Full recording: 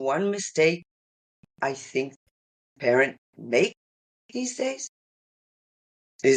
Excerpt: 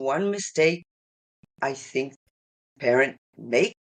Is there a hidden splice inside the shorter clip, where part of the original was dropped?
no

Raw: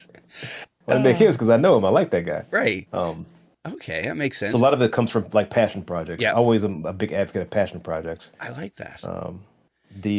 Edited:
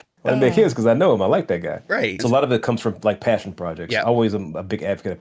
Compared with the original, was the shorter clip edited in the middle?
yes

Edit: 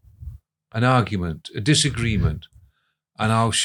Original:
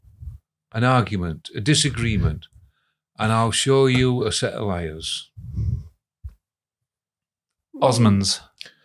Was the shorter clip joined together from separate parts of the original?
no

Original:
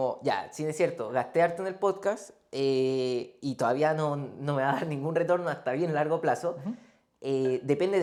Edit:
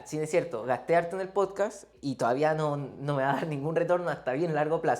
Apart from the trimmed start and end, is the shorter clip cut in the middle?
yes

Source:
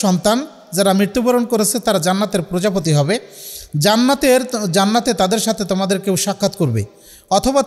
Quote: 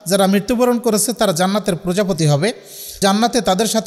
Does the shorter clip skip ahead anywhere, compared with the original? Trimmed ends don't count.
yes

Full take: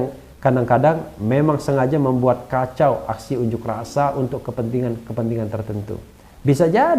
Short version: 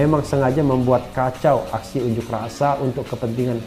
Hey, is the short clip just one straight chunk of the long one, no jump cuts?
yes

